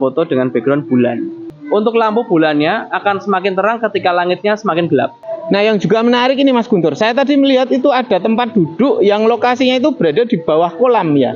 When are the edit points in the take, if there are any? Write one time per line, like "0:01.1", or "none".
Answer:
0:01.5
0:05.2